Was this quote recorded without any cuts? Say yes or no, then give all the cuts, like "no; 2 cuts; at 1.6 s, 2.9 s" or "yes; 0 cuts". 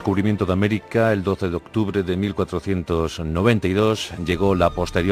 yes; 0 cuts